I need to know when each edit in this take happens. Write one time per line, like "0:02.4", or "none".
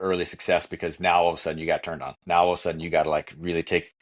none